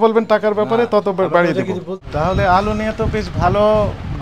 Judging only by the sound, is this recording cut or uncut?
cut